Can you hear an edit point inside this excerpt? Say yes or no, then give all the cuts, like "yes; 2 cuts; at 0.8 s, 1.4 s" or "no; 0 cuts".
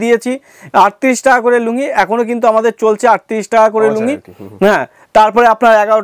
no; 0 cuts